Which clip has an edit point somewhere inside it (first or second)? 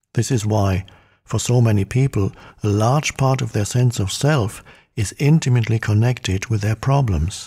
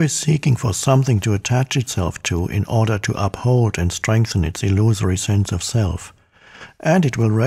second